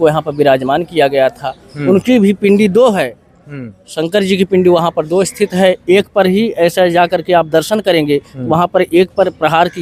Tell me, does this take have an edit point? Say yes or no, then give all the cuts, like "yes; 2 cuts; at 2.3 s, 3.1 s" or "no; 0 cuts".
no; 0 cuts